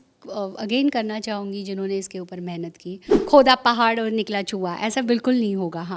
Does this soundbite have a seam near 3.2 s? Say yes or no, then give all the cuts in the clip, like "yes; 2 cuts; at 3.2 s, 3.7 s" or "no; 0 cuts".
yes; 1 cut; at 3.2 s